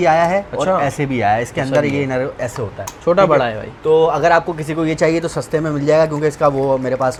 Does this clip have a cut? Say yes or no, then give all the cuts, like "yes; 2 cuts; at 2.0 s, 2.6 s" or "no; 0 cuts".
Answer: no; 0 cuts